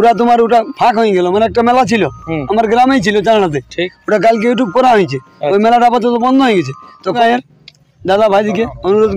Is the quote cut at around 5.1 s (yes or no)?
no